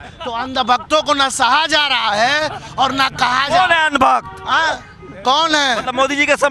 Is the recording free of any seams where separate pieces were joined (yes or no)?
yes